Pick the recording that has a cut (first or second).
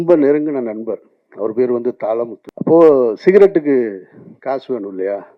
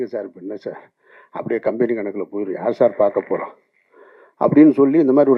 first